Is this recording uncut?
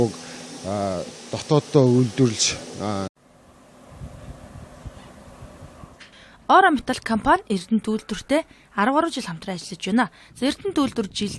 yes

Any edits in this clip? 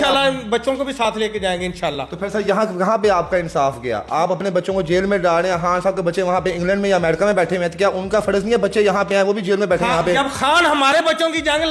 no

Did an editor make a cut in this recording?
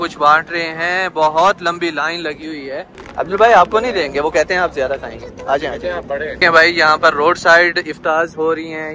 yes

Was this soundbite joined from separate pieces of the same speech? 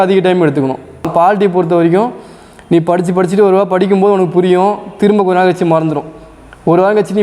yes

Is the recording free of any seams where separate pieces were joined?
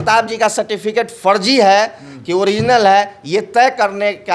yes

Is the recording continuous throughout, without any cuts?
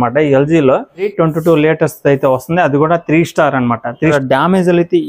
no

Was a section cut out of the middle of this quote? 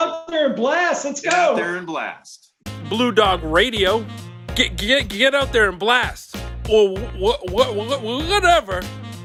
no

